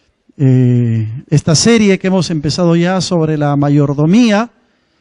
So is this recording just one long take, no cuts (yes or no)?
no